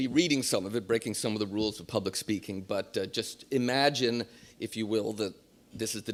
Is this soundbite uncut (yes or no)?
yes